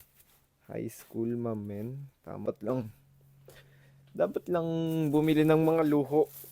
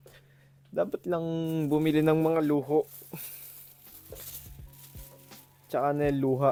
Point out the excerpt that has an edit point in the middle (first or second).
first